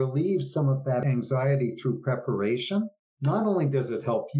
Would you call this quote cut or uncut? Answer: cut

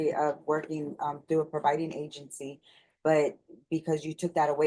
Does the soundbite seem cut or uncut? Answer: uncut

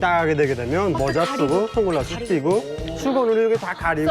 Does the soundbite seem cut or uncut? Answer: uncut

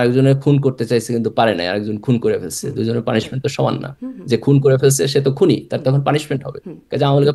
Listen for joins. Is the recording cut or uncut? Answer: uncut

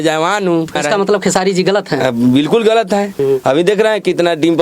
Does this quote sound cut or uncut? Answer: cut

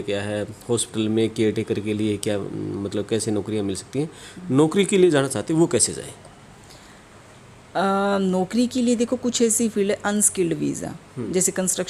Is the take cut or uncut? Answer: uncut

